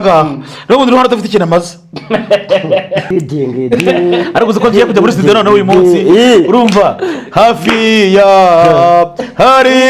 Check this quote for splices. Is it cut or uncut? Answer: cut